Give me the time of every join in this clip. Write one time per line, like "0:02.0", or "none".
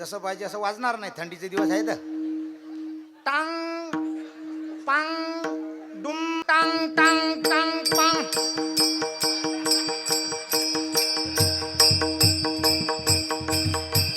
0:06.4